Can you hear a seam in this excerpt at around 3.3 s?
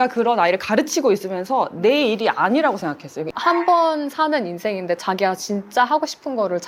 yes; 1 cut; at 3.3 s

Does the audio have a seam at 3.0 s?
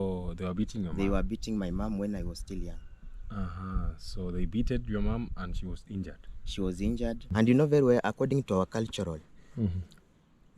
no; 1 cut; at 7.3 s

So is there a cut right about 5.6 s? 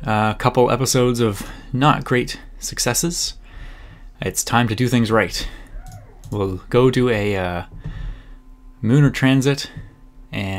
no; 0 cuts

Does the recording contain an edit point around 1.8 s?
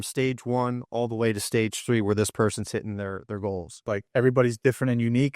no; 1 cut; at 4.0 s

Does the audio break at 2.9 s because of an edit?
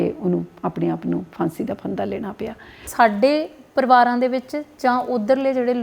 yes; 1 cut; at 2.9 s

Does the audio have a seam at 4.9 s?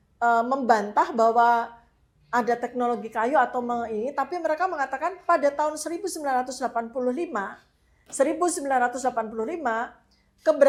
no; 0 cuts

